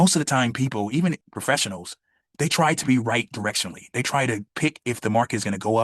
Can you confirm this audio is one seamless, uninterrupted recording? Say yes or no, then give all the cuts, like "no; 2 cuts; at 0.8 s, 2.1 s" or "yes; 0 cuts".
no; 1 cut; at 1.2 s